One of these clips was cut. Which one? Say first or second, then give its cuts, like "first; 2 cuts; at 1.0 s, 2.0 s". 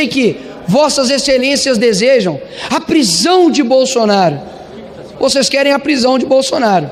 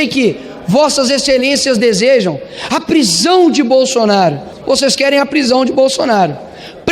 second; 1 cut; at 4.5 s